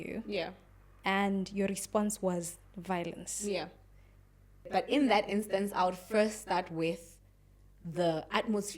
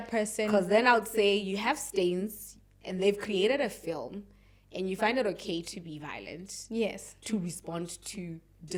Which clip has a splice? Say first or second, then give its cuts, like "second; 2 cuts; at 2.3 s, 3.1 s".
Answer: first; 1 cut; at 4.7 s